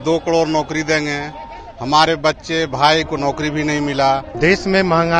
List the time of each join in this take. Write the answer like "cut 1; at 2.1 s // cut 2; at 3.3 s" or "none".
cut 1; at 4.3 s